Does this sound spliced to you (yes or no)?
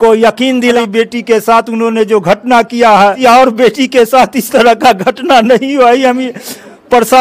yes